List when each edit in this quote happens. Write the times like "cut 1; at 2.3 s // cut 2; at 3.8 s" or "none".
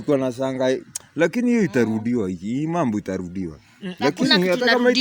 none